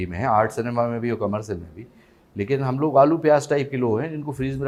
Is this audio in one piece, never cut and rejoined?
yes; 0 cuts

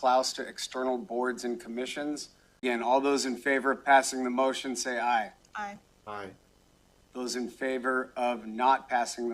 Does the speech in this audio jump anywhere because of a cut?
yes; 1 cut; at 2.6 s

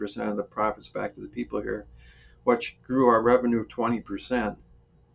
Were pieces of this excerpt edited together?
no; 0 cuts

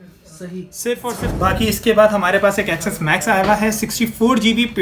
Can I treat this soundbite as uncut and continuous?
no; 1 cut; at 1.3 s

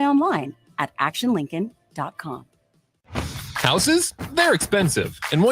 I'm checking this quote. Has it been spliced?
yes; 1 cut; at 2.9 s

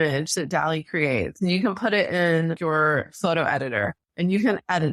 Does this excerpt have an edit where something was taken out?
yes; 1 cut; at 4.0 s

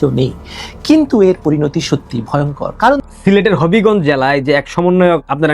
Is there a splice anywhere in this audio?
yes; 1 cut; at 3.0 s

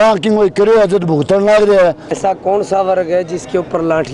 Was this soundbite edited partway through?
yes; 1 cut; at 2.1 s

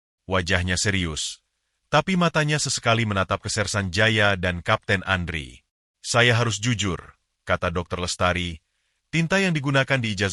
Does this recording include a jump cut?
no; 0 cuts

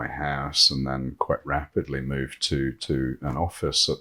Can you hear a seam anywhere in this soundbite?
no; 0 cuts

